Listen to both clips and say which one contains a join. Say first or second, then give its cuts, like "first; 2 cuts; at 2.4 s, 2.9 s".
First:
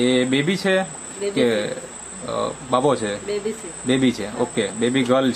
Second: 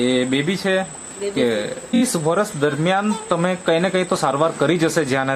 second; 1 cut; at 2.0 s